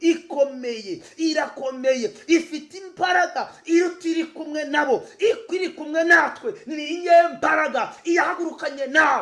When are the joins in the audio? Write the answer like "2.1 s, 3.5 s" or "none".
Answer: none